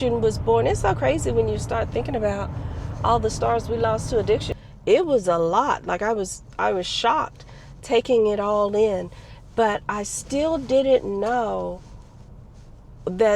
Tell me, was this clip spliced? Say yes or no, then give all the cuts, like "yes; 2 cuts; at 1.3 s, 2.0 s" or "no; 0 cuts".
yes; 1 cut; at 4.6 s